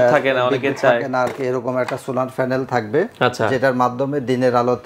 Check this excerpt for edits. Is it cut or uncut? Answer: uncut